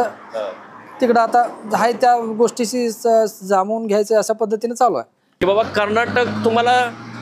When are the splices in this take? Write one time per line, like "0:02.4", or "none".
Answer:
0:05.4